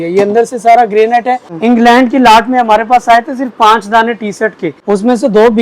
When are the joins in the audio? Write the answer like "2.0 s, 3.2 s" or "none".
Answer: 1.5 s, 4.7 s